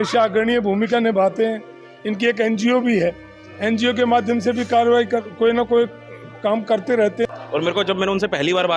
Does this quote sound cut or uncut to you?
cut